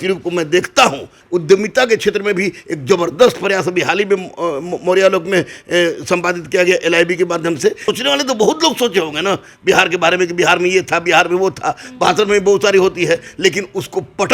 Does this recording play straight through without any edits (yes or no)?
no